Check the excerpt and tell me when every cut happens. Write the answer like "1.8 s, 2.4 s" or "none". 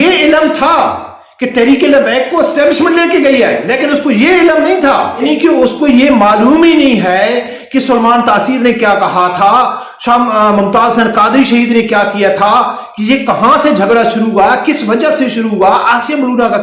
5.2 s